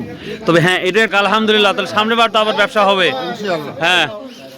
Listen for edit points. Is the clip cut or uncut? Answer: cut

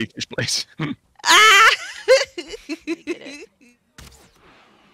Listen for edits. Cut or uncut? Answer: cut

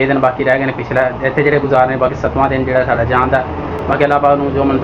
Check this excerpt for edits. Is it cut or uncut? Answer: uncut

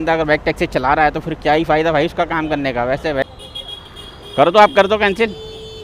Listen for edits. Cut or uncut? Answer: cut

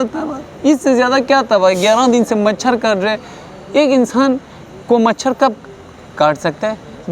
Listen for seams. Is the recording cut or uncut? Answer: uncut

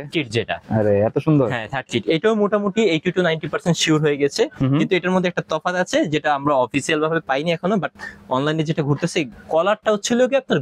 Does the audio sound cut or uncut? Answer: uncut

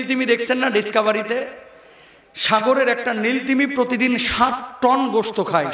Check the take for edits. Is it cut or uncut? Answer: uncut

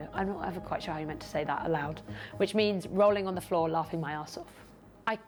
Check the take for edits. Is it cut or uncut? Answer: uncut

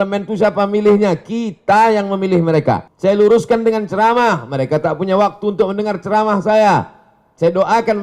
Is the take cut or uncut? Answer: cut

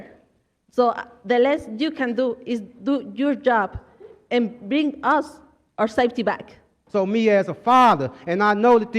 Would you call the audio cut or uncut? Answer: cut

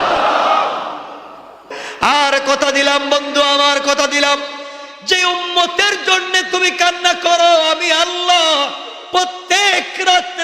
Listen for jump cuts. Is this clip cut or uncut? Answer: cut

